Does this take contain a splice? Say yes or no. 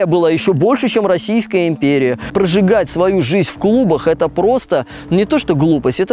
yes